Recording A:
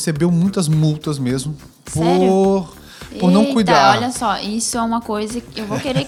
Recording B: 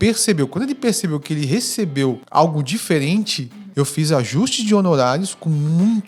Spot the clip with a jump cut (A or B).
B